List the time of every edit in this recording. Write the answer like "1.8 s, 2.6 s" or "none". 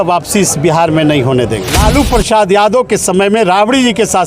1.7 s

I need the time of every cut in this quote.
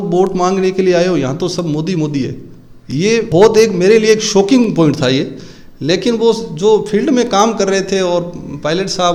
none

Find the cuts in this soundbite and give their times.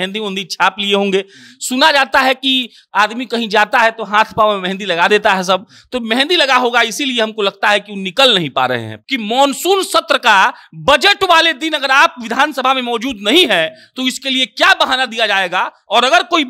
8.9 s

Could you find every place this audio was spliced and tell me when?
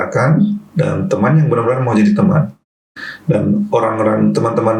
2.7 s

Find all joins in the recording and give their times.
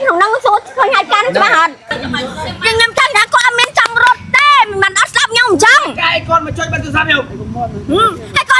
1.9 s

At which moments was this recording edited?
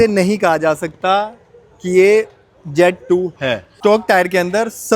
3.7 s

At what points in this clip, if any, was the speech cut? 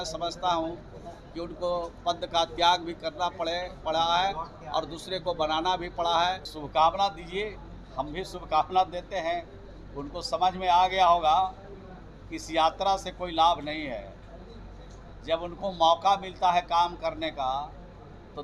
6.5 s

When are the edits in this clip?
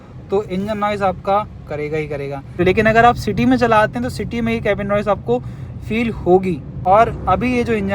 2.6 s, 6.7 s

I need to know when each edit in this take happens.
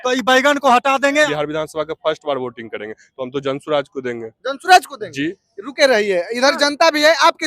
1.2 s

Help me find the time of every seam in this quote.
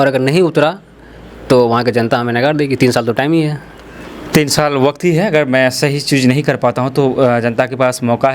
none

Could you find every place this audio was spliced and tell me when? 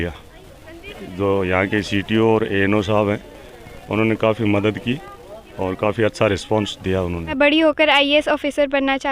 1.0 s, 7.3 s

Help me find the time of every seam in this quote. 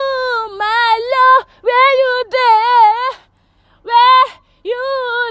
none

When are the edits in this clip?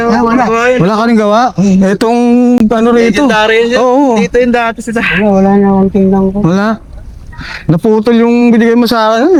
none

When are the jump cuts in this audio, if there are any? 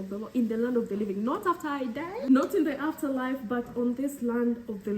2.3 s

